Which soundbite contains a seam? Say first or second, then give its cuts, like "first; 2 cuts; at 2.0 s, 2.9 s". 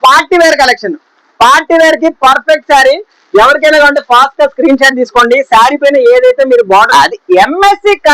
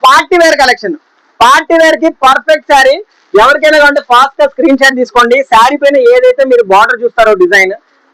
first; 1 cut; at 6.9 s